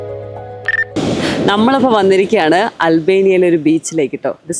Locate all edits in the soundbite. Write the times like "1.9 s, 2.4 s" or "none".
1.0 s